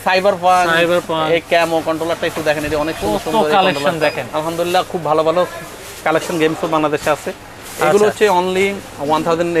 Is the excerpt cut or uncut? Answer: uncut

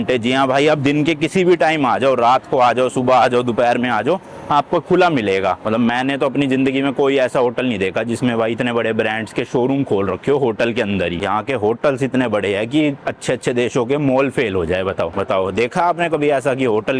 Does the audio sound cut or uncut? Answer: cut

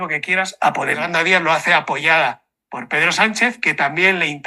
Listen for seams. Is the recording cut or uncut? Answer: cut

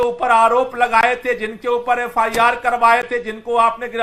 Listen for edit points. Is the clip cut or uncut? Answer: uncut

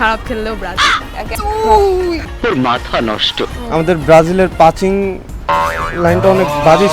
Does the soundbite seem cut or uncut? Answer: cut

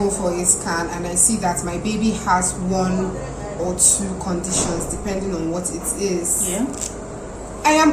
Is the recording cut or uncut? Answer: uncut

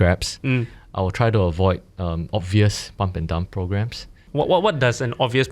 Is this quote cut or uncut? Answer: cut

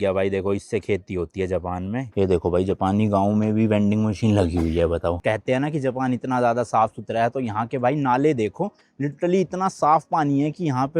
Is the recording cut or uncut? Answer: cut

